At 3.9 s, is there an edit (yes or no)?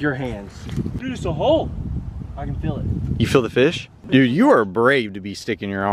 yes